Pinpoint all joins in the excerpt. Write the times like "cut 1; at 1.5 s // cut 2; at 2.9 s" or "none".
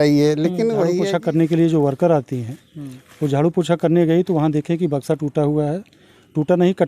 cut 1; at 1.0 s